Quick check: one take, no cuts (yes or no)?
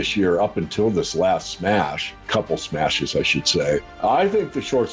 no